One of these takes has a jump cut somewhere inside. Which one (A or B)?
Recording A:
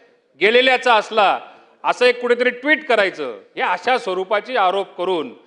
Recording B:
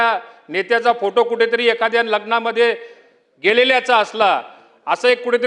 A